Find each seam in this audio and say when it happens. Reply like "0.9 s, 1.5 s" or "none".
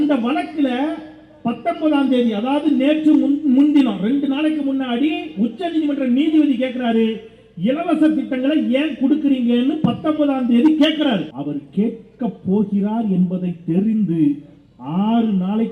11.3 s